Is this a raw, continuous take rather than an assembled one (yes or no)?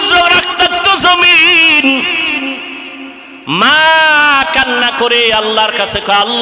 yes